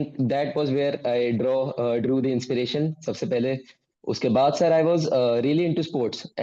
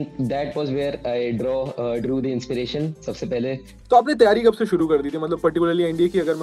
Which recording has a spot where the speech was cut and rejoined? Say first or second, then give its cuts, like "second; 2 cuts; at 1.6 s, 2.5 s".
second; 1 cut; at 3.8 s